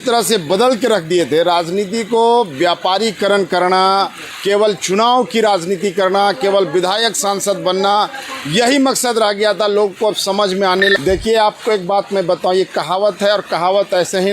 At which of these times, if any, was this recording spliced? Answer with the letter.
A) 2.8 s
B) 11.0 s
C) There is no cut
B